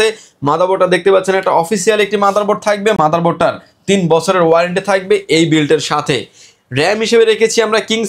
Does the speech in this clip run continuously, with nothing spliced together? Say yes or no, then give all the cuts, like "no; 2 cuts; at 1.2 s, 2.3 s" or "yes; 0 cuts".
yes; 0 cuts